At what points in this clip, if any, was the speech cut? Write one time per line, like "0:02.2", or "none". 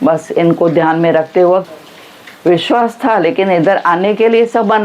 0:01.6